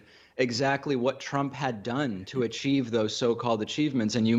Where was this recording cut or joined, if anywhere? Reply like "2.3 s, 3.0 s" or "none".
none